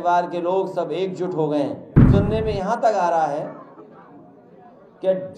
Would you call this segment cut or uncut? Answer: cut